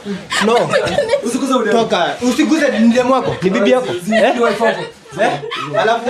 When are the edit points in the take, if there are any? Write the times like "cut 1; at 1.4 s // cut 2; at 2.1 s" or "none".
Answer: none